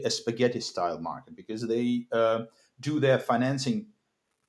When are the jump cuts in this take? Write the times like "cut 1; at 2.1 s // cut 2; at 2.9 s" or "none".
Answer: none